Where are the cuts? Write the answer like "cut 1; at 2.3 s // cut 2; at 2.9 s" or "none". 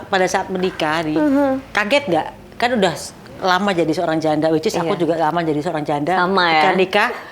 none